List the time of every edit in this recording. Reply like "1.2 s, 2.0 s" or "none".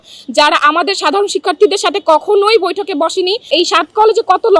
3.5 s